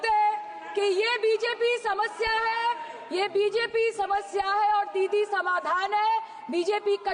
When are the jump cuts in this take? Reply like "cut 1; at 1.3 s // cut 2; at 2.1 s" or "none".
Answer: none